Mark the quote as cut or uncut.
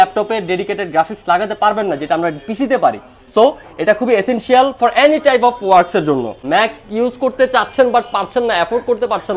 cut